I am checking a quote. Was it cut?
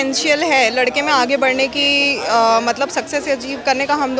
no; 0 cuts

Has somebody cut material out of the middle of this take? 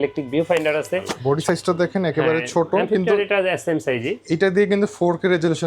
yes; 1 cut; at 1.1 s

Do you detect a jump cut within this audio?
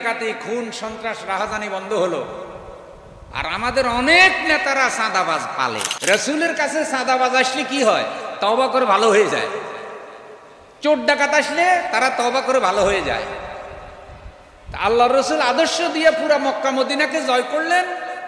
yes; 1 cut; at 5.9 s

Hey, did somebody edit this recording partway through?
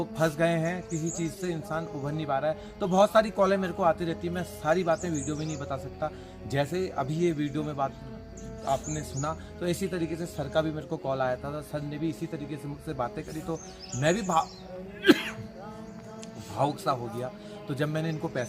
no; 0 cuts

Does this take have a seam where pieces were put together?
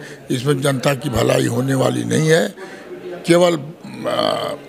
no; 0 cuts

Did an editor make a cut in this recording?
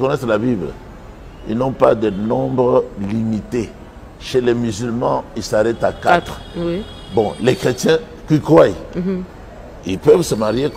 no; 0 cuts

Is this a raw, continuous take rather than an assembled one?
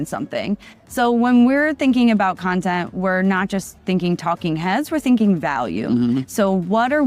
yes; 0 cuts

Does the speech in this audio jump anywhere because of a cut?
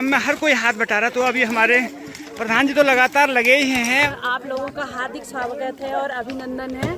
yes; 1 cut; at 4.1 s

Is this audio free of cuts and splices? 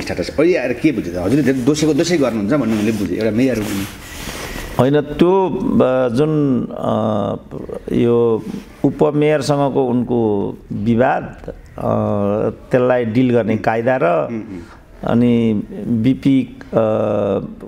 yes; 0 cuts

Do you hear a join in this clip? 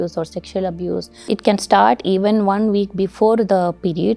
yes; 1 cut; at 1.3 s

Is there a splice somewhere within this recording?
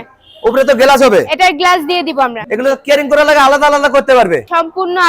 yes; 1 cut; at 2.4 s

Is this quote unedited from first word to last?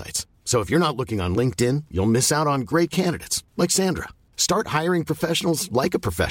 yes; 0 cuts

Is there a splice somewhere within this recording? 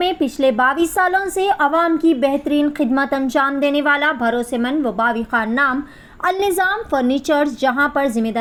no; 0 cuts

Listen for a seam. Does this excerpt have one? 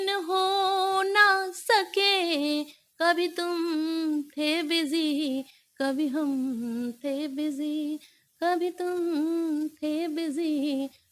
no; 0 cuts

